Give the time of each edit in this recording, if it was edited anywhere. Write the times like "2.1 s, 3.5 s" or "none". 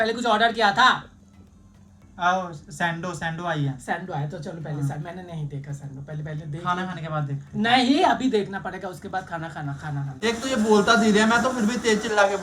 10.1 s